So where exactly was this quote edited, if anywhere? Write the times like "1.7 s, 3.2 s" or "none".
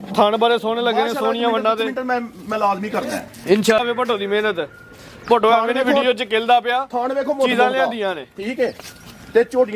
3.8 s

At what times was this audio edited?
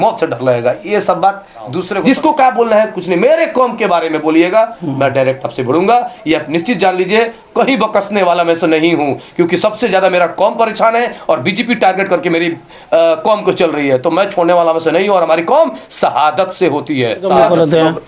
1.9 s, 17.3 s

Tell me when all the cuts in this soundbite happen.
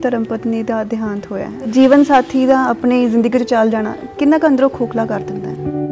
1.7 s, 5.2 s

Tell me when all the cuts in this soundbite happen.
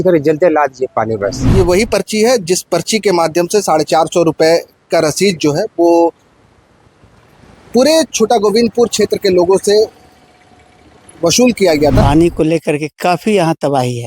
1.4 s, 12.0 s

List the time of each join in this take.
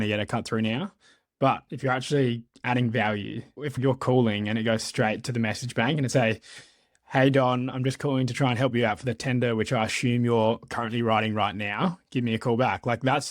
3.7 s

